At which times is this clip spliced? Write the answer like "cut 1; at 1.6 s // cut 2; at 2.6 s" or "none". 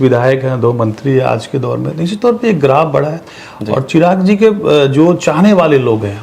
none